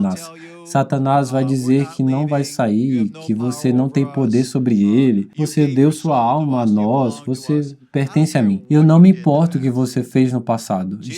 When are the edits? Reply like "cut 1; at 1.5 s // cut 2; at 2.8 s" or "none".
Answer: cut 1; at 5.4 s // cut 2; at 8.6 s